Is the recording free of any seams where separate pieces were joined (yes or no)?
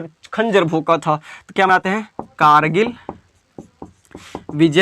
yes